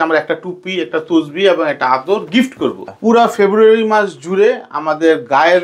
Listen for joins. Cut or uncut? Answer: cut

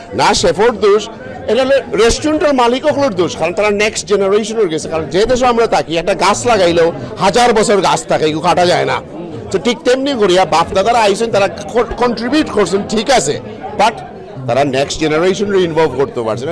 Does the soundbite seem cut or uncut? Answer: uncut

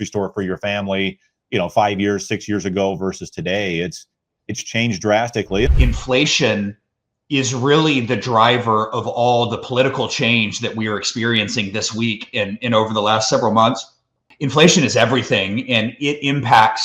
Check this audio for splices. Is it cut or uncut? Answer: cut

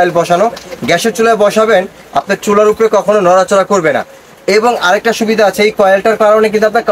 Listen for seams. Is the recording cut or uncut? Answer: uncut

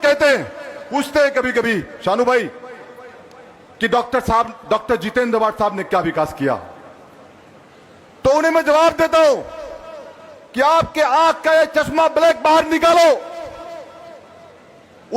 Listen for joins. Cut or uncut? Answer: uncut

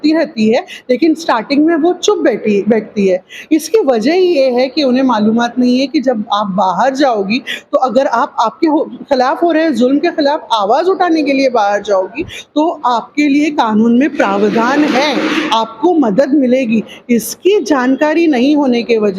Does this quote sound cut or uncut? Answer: uncut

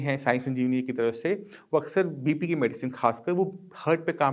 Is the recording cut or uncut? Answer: uncut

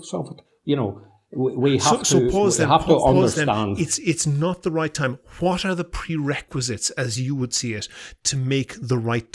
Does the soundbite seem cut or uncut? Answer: uncut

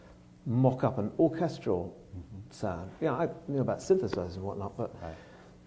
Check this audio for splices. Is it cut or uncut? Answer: cut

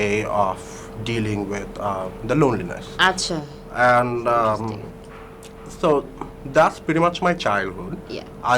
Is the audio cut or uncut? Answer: uncut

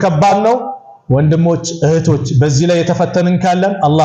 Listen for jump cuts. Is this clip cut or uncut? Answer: uncut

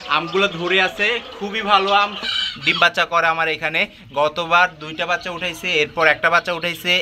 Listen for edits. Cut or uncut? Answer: cut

